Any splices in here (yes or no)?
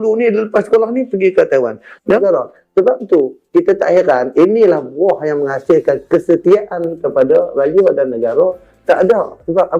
yes